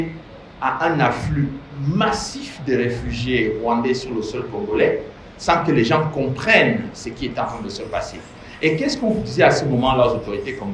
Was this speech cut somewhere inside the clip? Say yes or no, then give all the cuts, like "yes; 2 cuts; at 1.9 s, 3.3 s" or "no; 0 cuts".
no; 0 cuts